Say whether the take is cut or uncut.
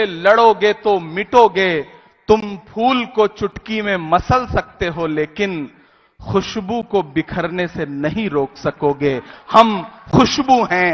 uncut